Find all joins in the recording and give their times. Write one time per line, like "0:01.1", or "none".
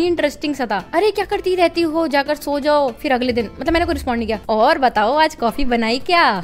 0:00.8
0:03.0
0:04.4